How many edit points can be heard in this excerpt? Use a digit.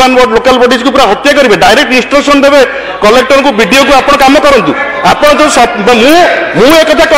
0